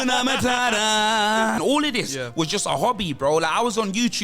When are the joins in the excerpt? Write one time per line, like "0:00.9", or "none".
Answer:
0:01.6